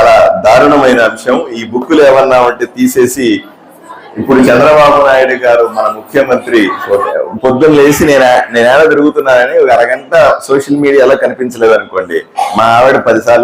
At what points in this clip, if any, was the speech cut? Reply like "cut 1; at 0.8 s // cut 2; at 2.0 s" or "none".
cut 1; at 7.1 s